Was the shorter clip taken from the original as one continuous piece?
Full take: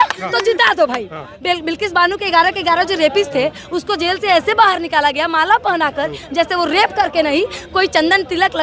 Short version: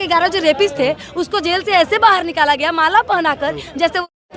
yes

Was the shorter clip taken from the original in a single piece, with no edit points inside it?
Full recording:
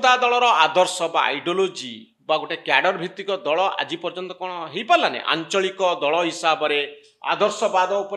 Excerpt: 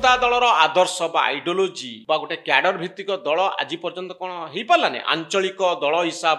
no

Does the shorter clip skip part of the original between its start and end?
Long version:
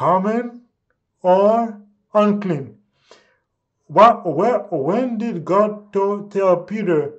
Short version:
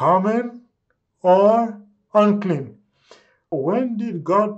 yes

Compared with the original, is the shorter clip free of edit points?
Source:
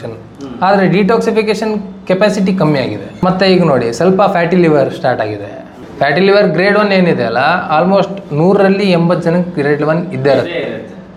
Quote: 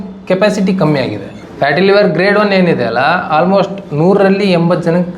no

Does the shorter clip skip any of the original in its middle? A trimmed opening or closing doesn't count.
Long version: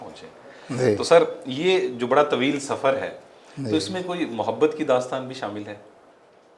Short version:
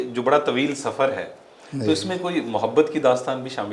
no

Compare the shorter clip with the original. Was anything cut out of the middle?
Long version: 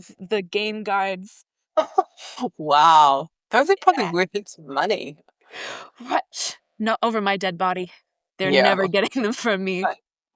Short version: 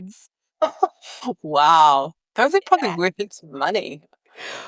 no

